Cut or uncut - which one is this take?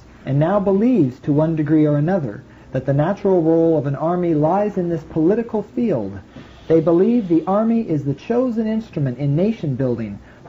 cut